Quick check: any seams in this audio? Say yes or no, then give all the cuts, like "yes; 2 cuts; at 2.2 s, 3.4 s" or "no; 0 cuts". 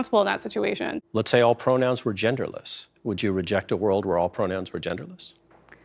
yes; 1 cut; at 1.0 s